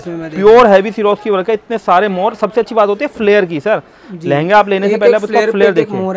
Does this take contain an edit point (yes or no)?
no